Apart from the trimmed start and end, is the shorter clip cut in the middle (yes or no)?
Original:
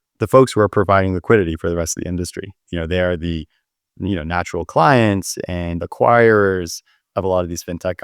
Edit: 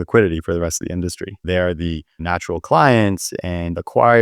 yes